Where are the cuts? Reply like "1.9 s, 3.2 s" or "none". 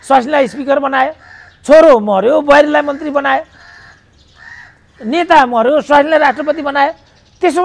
none